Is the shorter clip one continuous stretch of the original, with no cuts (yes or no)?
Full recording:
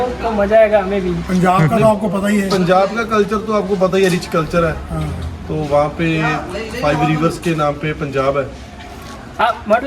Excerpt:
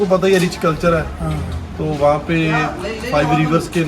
yes